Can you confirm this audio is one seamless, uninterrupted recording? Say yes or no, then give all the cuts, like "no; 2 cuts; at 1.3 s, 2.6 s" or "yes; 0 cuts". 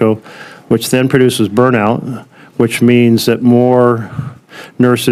yes; 0 cuts